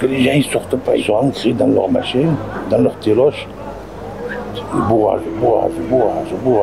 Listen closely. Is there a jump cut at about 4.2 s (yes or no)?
no